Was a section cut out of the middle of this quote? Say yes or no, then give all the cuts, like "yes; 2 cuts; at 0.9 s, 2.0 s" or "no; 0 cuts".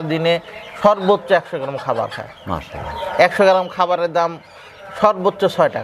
no; 0 cuts